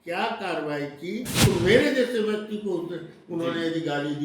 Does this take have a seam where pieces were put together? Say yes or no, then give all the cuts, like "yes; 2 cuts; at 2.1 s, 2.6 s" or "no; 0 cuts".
yes; 1 cut; at 1.3 s